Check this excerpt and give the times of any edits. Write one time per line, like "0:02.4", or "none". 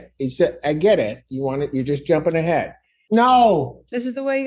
0:02.9